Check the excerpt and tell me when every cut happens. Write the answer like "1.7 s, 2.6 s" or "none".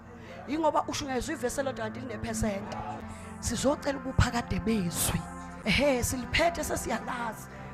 3.0 s, 5.5 s